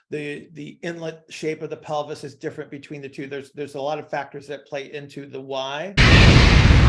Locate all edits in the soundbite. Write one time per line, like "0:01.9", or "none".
0:06.0

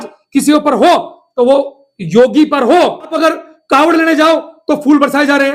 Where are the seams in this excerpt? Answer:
0:03.1

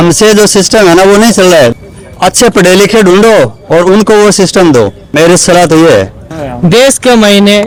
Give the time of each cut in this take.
none

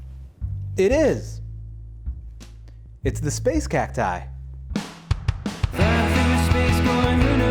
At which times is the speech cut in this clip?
0:04.7

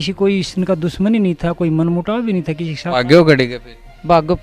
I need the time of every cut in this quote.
0:02.8

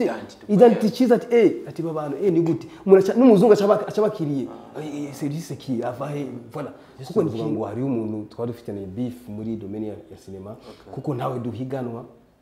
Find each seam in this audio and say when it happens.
0:07.3

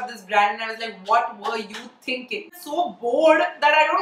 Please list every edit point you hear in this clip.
0:02.6

